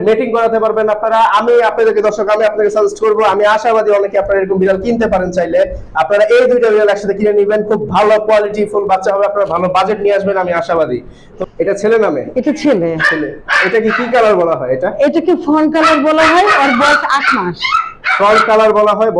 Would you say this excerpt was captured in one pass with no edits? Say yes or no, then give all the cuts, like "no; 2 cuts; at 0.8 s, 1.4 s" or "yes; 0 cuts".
no; 1 cut; at 11.4 s